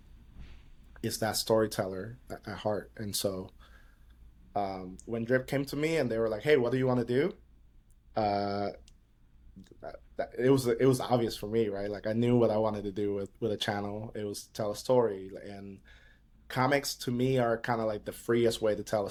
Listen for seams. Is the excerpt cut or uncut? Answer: uncut